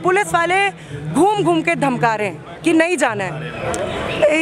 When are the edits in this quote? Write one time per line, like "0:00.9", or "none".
0:03.5